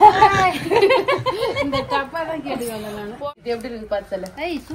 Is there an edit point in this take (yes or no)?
yes